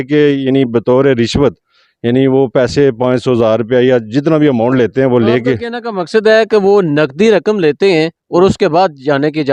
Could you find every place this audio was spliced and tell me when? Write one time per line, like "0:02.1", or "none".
none